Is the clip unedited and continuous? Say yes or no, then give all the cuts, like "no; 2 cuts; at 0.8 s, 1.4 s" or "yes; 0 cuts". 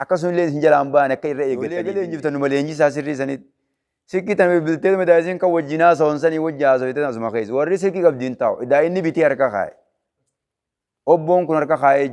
no; 1 cut; at 1.8 s